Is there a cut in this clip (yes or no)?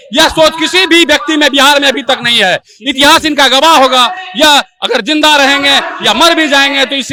no